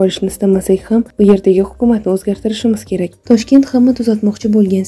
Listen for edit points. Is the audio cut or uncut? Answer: cut